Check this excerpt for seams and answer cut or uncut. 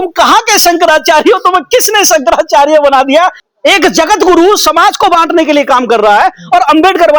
cut